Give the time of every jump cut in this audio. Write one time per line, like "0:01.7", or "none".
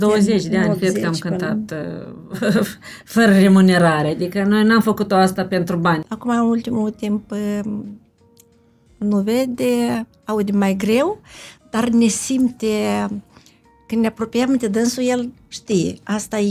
0:06.0